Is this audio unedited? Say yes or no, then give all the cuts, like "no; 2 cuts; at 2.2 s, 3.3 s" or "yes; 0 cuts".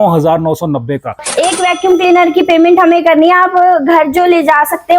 no; 1 cut; at 1.3 s